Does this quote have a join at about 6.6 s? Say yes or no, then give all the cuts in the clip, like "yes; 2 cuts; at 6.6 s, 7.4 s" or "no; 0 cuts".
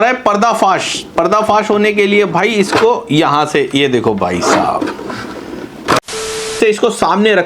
yes; 1 cut; at 6.6 s